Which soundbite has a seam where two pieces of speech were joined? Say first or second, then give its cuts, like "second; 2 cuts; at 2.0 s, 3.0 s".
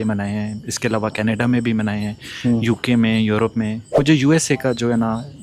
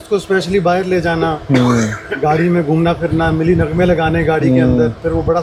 first; 1 cut; at 4.0 s